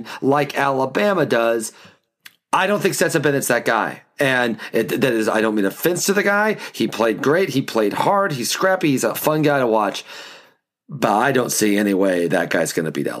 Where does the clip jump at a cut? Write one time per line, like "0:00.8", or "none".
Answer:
0:09.2